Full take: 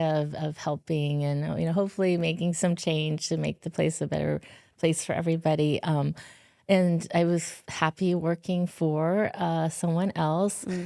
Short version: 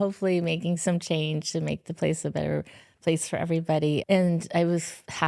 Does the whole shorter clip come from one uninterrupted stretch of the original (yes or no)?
no